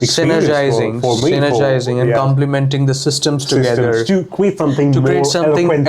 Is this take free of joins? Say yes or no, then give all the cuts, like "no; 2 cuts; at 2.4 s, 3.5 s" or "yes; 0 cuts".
yes; 0 cuts